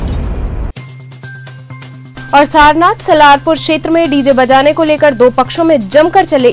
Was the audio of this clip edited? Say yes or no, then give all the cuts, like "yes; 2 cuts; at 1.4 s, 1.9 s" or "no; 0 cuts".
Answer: no; 0 cuts